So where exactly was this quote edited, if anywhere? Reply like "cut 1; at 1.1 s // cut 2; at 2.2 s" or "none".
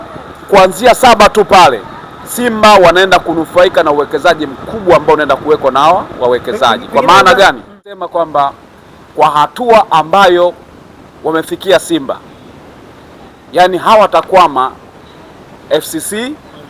cut 1; at 8.0 s